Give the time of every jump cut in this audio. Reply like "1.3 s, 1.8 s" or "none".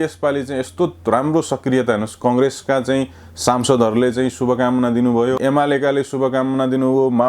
5.4 s